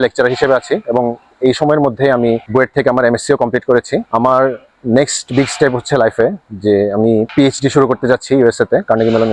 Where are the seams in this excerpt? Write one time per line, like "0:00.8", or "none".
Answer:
none